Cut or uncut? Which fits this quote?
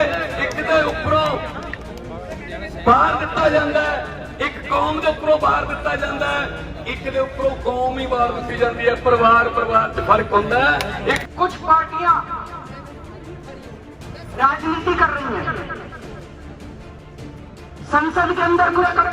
cut